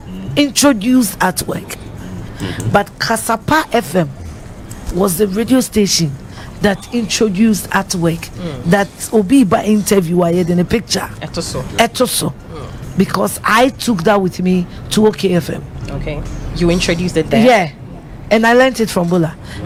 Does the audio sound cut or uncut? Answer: uncut